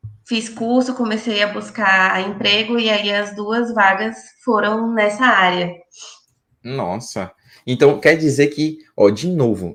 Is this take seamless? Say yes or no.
yes